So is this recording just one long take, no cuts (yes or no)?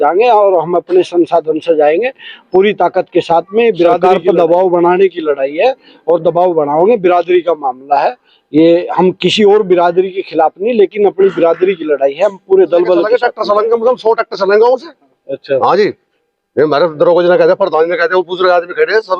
no